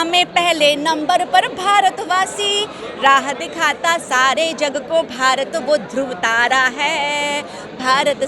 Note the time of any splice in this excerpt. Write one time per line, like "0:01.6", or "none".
none